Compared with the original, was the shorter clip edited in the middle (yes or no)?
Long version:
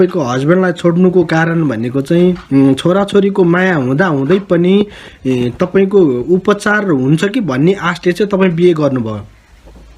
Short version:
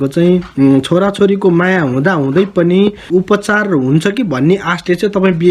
yes